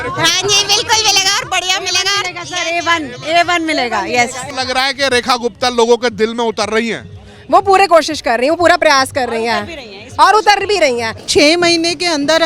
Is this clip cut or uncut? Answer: cut